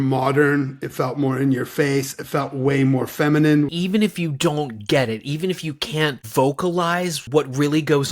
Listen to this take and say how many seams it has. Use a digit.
2